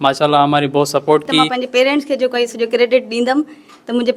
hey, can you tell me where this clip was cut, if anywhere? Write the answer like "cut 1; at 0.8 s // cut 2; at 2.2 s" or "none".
cut 1; at 1.5 s

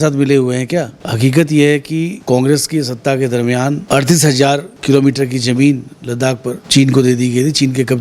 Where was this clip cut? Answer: cut 1; at 1.0 s // cut 2; at 2.2 s // cut 3; at 3.8 s // cut 4; at 4.7 s // cut 5; at 6.6 s

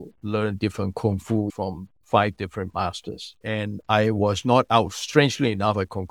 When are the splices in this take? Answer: none

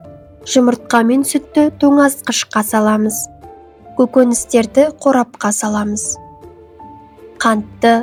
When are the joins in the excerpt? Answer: none

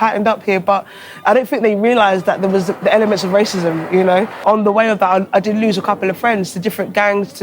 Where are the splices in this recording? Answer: cut 1; at 4.4 s

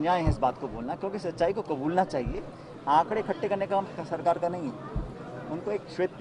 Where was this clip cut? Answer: cut 1; at 2.7 s

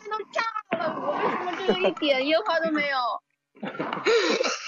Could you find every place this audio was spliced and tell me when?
none

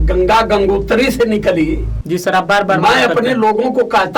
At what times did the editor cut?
cut 1; at 1.9 s

